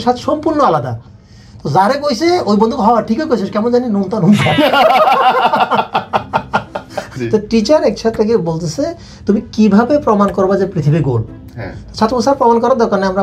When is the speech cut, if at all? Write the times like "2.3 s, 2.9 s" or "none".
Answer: 7.0 s